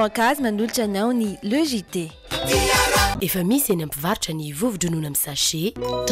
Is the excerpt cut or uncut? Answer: cut